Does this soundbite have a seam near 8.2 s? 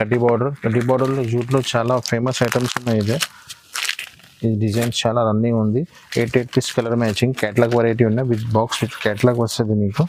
no; 0 cuts

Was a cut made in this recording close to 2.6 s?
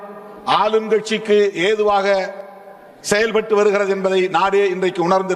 no; 0 cuts

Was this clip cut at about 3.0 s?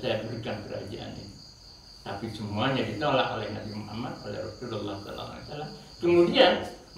no; 0 cuts

